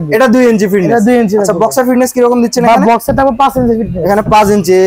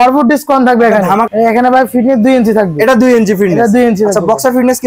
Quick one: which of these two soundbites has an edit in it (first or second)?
second